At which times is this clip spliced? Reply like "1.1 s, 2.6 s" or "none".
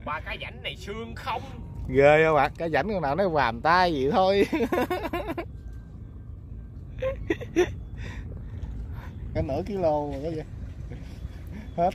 9.2 s